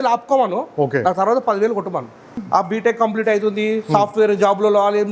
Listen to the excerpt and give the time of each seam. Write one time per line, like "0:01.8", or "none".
0:02.3